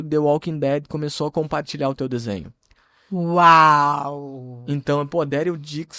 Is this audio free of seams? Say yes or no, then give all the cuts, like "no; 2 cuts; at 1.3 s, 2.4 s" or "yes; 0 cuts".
yes; 0 cuts